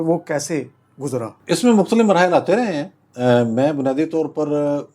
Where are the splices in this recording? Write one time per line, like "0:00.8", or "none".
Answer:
none